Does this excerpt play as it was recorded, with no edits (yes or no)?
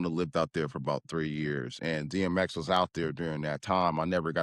yes